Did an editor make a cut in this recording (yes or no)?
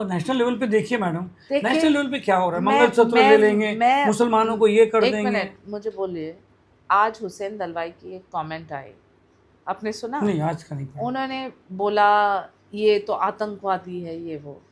no